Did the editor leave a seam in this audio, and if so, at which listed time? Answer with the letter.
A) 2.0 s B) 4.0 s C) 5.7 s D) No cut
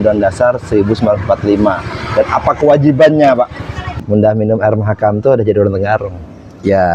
B